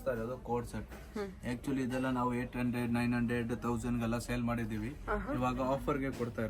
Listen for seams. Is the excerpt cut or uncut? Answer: uncut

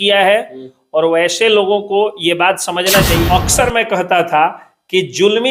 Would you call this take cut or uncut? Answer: cut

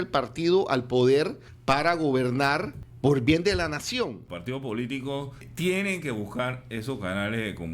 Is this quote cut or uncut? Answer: cut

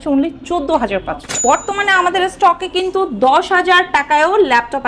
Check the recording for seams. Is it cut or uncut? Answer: cut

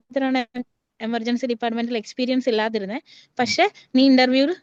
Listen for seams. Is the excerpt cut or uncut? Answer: uncut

